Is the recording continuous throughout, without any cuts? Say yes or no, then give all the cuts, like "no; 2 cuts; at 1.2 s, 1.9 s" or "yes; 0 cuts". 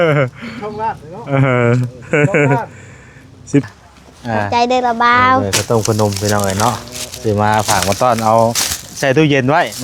no; 1 cut; at 3.7 s